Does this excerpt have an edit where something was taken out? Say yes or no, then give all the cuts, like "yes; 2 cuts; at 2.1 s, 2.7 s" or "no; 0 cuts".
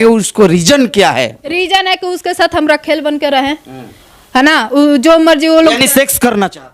no; 0 cuts